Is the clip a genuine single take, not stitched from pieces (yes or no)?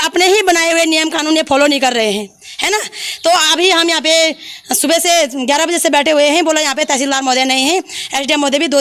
yes